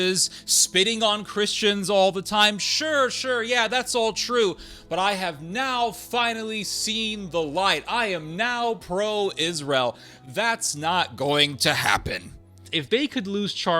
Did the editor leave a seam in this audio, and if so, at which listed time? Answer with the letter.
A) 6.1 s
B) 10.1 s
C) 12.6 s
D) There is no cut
C